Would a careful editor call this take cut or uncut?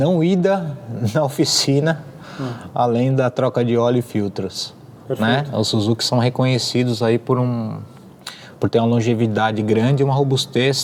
uncut